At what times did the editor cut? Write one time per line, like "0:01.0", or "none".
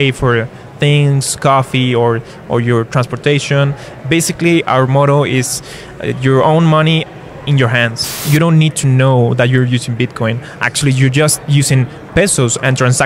0:08.2

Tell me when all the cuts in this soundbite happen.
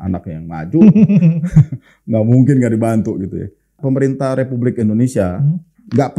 0:03.7

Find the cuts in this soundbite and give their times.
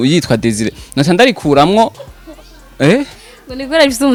none

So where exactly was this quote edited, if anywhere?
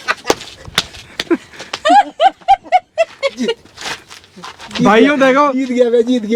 none

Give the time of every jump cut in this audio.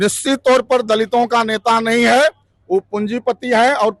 none

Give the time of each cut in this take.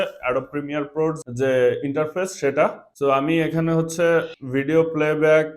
0:01.2
0:02.9
0:04.4

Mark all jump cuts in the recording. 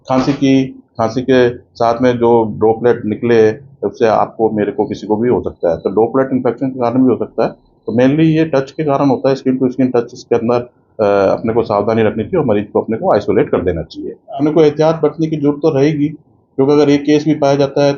0:14.4

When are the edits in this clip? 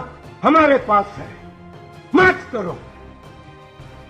0:03.0

